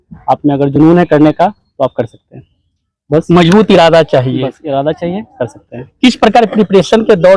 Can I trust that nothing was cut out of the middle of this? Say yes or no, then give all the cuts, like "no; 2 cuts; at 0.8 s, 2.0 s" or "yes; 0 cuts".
yes; 0 cuts